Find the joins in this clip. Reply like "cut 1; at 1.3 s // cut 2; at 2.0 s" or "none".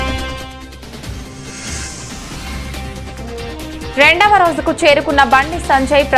cut 1; at 1.3 s